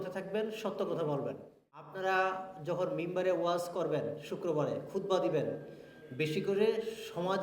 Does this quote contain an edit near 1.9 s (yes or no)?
yes